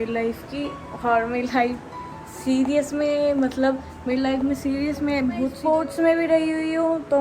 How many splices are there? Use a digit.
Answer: 1